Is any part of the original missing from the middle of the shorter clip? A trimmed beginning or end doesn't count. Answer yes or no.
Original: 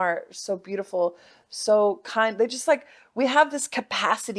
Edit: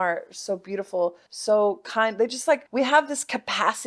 yes